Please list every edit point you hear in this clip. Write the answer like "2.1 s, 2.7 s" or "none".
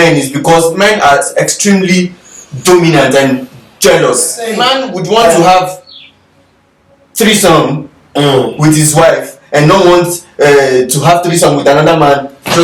none